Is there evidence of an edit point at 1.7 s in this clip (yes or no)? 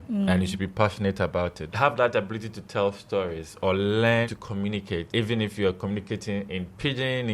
yes